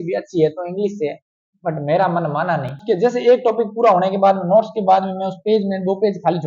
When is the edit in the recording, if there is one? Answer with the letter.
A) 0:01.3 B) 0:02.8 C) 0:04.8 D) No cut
B